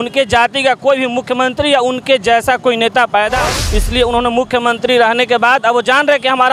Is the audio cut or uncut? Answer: cut